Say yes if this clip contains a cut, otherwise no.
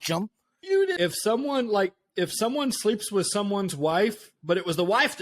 yes